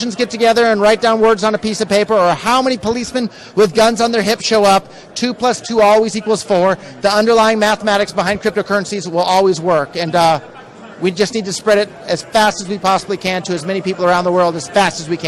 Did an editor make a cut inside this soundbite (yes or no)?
no